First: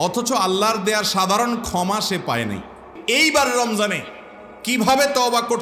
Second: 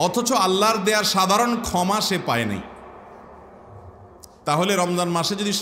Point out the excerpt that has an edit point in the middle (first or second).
first